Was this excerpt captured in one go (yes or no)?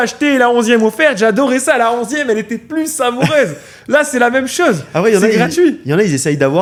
yes